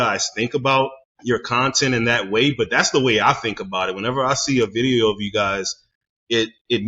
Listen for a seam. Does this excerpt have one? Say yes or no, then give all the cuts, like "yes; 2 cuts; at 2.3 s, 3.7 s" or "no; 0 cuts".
yes; 1 cut; at 1.1 s